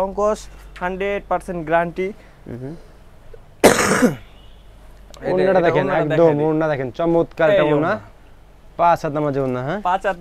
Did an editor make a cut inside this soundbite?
no; 0 cuts

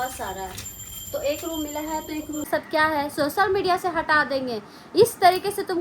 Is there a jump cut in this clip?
yes; 1 cut; at 2.5 s

